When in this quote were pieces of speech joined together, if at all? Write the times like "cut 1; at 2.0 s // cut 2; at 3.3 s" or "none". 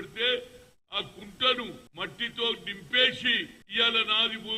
cut 1; at 1.8 s // cut 2; at 3.6 s